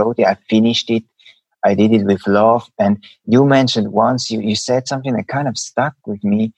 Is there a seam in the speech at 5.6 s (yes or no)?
yes